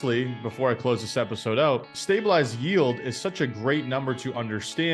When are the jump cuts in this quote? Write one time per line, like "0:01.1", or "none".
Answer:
0:01.9